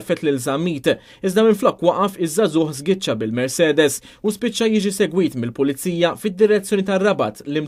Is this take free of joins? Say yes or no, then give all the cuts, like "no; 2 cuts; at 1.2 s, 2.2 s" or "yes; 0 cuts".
no; 1 cut; at 4.1 s